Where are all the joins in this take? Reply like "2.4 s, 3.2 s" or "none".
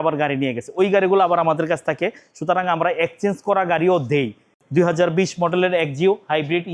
4.6 s